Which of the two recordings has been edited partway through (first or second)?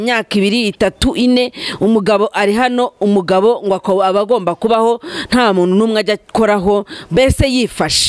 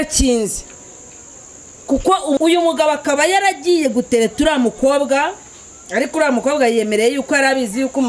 second